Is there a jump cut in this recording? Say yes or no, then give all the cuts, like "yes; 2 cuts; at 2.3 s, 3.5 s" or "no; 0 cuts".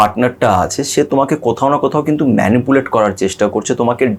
no; 0 cuts